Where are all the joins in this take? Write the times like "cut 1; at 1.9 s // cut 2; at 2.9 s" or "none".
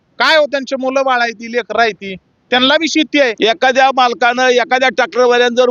cut 1; at 3.4 s